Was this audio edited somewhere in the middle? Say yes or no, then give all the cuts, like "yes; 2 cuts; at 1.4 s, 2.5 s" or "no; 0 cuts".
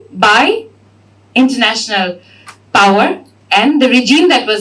no; 0 cuts